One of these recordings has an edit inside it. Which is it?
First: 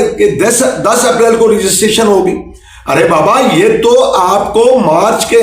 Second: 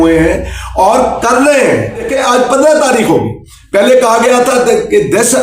second; 1 cut; at 2.1 s

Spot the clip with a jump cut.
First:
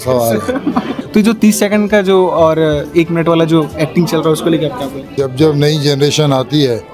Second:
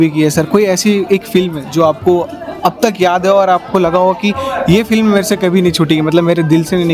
first; 2 cuts; at 1.0 s, 5.2 s

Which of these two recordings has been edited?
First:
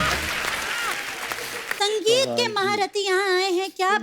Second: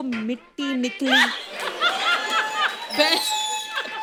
first; 1 cut; at 1.6 s

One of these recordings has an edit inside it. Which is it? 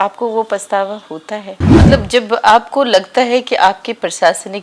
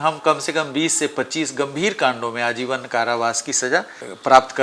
first; 1 cut; at 1.6 s

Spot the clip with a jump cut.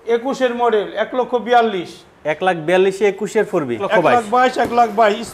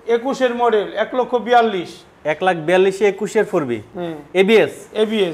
first; 1 cut; at 3.8 s

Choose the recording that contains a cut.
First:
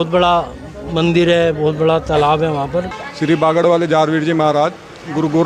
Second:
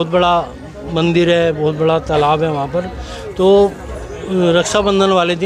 first; 1 cut; at 3.1 s

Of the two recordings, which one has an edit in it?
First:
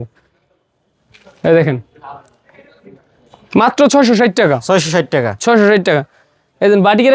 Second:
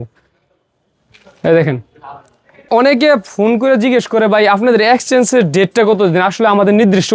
second; 1 cut; at 2.7 s

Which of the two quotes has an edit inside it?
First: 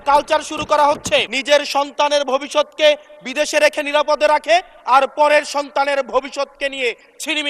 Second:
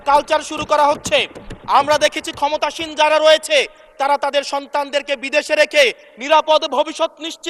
first; 1 cut; at 1.3 s

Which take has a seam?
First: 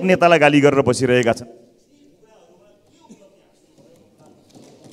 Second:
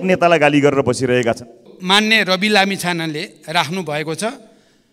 second; 1 cut; at 1.7 s

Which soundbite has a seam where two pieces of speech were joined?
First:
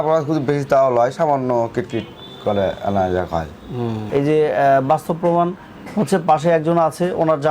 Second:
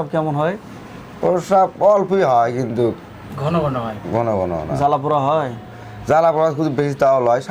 first; 1 cut; at 4.0 s

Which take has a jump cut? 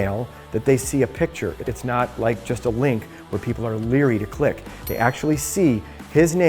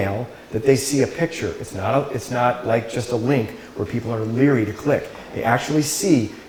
first; 1 cut; at 1.7 s

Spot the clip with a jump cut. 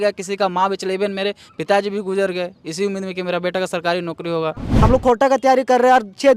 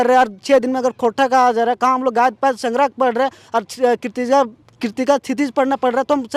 first; 1 cut; at 4.6 s

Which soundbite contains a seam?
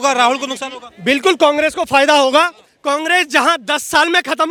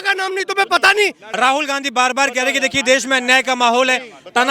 second; 1 cut; at 1.2 s

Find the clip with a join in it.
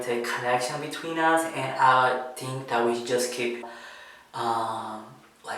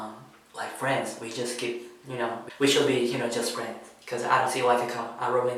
first; 1 cut; at 3.7 s

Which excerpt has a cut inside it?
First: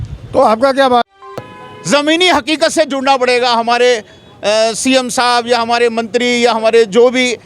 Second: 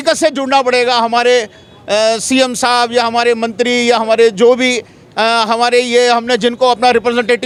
first; 1 cut; at 1.4 s

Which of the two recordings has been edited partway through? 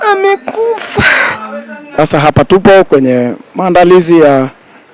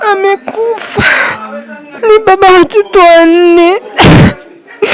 first; 1 cut; at 2.0 s

